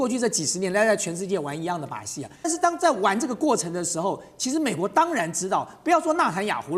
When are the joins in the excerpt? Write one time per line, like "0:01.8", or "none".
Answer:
0:02.5